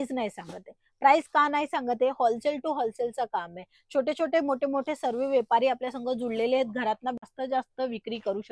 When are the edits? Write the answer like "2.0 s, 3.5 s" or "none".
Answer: 7.3 s